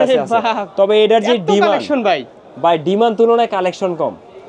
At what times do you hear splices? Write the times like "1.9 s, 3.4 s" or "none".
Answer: none

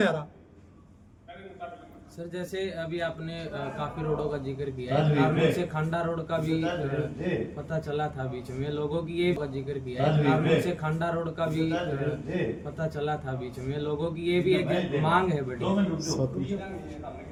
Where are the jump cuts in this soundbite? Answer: none

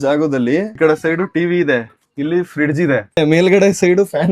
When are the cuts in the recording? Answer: 0.8 s, 3.2 s

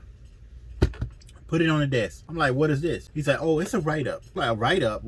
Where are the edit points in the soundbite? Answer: 2.2 s, 3.1 s, 4.2 s

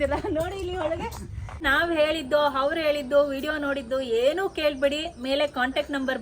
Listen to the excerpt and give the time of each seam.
1.6 s

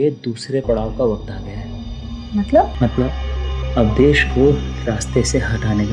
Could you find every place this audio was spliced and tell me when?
2.7 s

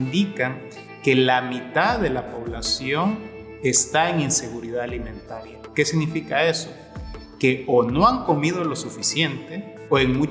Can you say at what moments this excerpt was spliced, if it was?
none

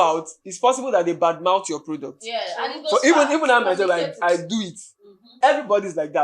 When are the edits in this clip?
5.2 s

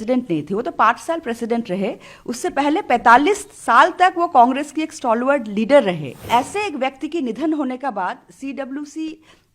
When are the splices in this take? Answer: 6.1 s

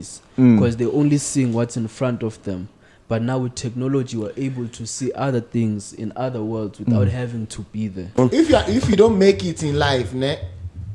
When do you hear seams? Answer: 8.2 s

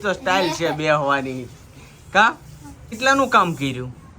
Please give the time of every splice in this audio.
2.9 s

